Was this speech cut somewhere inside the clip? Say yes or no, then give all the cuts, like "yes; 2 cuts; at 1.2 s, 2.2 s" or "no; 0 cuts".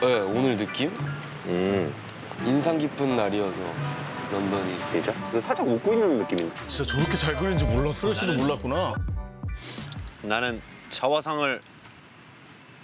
yes; 1 cut; at 6.7 s